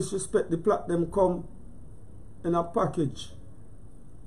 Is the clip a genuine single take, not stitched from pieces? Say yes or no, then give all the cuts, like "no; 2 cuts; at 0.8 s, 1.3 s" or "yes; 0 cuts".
yes; 0 cuts